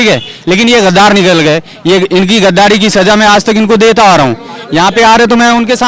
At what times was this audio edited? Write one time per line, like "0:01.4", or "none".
none